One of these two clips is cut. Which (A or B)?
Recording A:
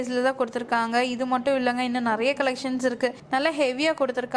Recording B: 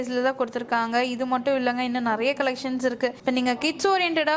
A